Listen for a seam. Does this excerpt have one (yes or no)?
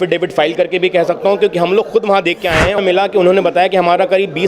yes